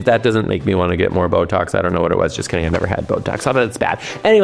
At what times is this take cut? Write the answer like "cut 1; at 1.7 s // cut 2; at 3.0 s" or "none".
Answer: none